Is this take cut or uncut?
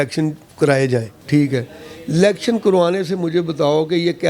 cut